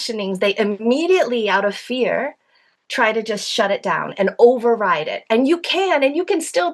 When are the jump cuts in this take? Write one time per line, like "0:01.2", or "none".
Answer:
none